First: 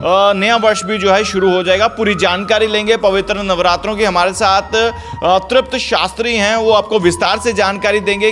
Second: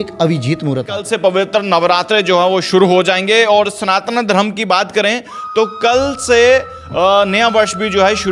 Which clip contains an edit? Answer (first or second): second